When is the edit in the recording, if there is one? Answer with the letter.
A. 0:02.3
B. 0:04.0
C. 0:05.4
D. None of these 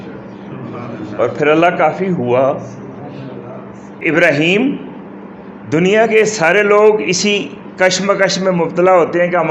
B